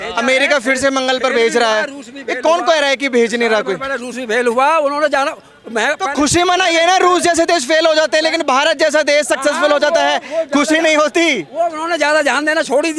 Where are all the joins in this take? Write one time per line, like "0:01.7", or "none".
none